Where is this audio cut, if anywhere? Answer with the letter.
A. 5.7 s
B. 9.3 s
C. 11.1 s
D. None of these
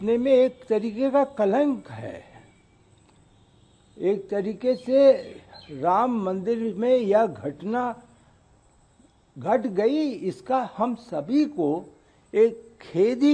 D